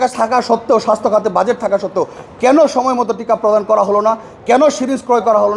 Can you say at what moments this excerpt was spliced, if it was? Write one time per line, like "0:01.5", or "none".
none